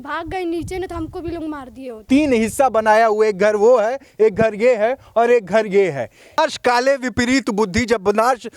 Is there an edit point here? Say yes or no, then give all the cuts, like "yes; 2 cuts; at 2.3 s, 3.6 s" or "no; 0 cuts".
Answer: yes; 2 cuts; at 2.0 s, 6.4 s